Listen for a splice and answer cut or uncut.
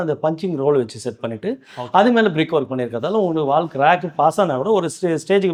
uncut